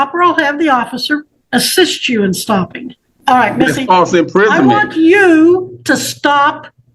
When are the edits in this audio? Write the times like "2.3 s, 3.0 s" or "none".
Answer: 1.4 s, 3.1 s

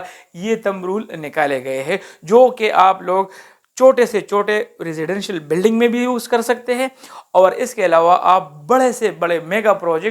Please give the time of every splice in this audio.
none

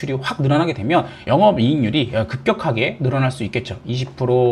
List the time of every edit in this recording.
none

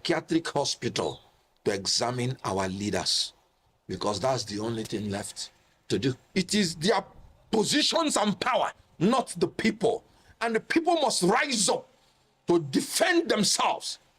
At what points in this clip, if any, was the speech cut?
6.2 s

